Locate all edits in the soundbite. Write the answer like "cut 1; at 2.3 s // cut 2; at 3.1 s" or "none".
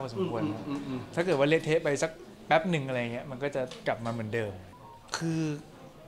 cut 1; at 4.7 s